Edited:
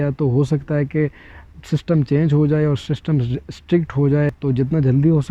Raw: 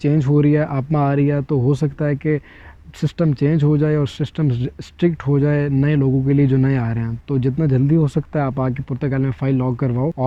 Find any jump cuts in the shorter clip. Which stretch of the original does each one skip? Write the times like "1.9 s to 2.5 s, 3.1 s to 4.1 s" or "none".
5.6 s to 7.2 s